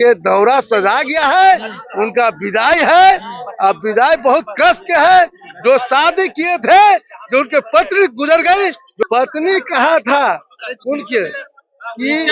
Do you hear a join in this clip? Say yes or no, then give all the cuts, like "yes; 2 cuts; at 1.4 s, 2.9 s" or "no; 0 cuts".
no; 0 cuts